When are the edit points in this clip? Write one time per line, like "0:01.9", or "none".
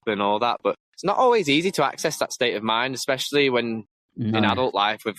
none